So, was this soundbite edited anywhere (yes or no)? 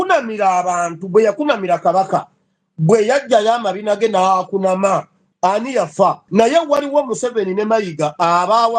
yes